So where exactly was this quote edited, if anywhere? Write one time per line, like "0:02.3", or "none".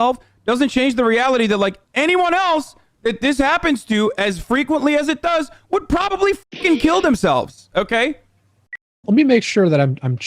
0:09.0